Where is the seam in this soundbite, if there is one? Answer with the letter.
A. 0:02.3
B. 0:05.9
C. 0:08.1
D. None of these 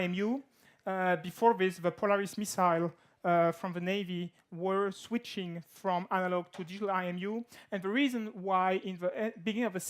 C